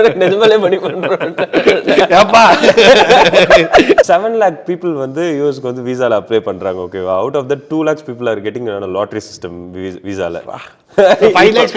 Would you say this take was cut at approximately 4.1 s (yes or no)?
yes